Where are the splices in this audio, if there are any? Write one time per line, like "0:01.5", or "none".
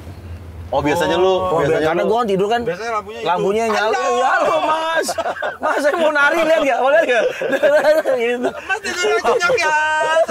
none